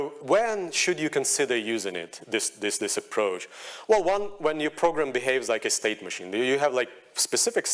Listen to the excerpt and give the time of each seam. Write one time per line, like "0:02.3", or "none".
none